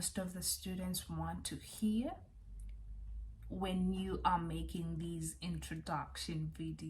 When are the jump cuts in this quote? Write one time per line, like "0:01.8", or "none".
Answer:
none